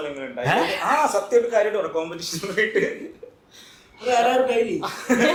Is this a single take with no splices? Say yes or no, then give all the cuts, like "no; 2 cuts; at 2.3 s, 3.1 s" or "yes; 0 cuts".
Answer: yes; 0 cuts